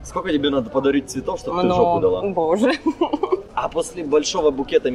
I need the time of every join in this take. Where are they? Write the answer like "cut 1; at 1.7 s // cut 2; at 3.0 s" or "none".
cut 1; at 3.5 s